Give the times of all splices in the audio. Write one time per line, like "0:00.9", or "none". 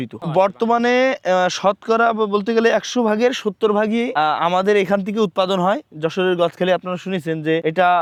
none